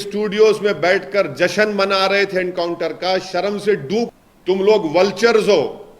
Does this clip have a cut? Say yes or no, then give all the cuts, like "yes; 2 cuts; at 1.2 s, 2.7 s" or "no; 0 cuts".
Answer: yes; 1 cut; at 4.1 s